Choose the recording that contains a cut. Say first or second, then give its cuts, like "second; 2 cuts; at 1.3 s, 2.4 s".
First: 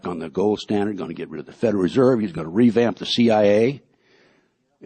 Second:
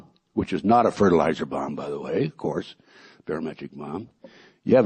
first; 1 cut; at 0.9 s